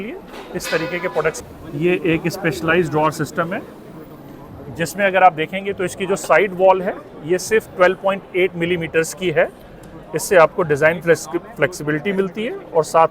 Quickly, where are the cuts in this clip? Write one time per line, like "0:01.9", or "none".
0:01.4